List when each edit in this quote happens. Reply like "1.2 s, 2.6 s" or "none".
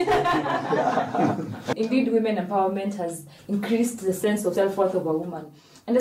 1.7 s, 4.5 s